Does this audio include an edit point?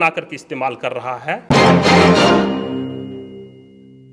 yes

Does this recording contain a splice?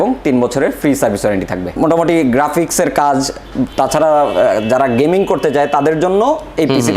yes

